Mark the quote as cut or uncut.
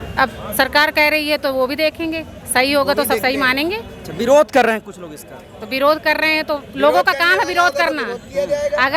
uncut